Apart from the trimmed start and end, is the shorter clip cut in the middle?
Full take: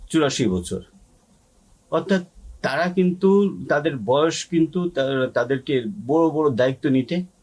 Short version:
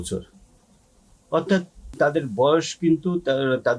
yes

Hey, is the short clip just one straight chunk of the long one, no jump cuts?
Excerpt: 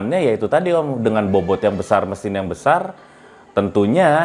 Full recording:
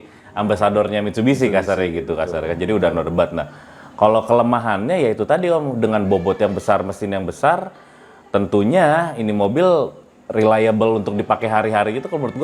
yes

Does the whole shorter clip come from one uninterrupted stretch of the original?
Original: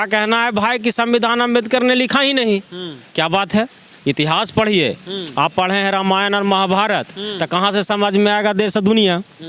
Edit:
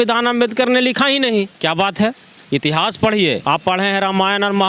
no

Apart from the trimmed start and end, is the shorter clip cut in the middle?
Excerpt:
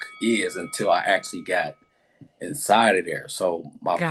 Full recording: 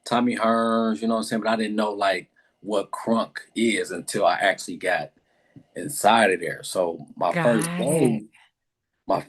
no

